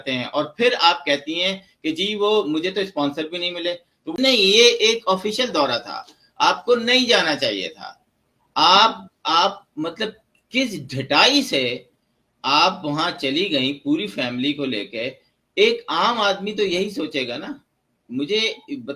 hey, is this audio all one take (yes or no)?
no